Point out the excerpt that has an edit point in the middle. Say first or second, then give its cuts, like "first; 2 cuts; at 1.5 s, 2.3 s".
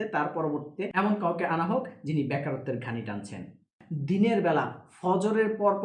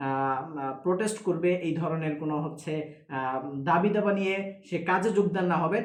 first; 1 cut; at 3.8 s